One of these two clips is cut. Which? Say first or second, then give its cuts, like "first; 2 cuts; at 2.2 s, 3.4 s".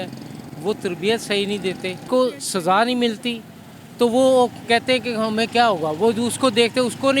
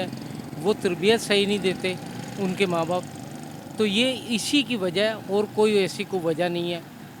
first; 1 cut; at 2.0 s